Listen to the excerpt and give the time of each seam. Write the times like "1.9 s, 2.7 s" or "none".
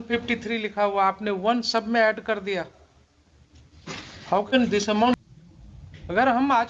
5.2 s